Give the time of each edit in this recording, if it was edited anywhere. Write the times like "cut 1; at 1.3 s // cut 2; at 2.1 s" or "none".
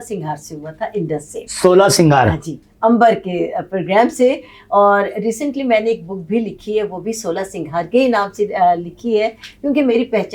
none